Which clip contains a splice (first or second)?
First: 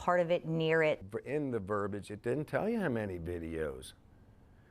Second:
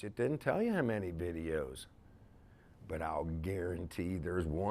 first